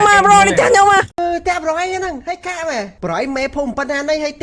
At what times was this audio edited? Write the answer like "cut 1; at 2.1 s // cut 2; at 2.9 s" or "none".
cut 1; at 2.9 s